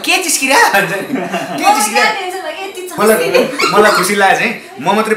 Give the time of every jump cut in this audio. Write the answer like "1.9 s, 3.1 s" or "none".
2.9 s